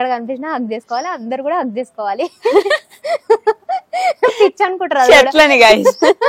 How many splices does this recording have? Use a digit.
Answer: 0